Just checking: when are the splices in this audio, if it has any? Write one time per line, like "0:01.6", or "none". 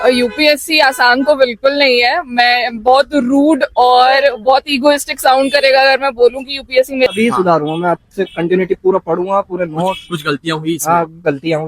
0:07.1